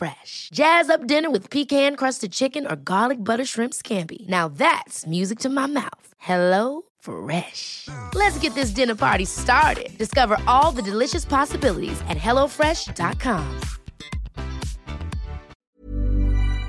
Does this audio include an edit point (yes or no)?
yes